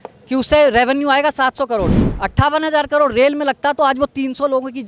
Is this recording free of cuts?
yes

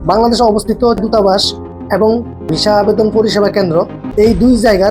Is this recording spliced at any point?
yes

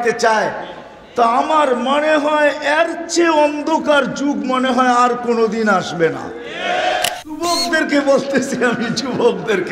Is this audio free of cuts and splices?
no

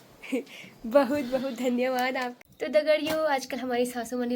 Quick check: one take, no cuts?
no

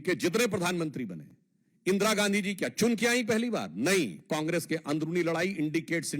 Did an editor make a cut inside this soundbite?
no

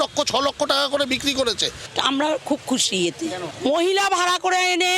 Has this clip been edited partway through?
yes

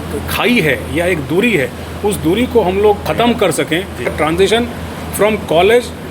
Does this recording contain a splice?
yes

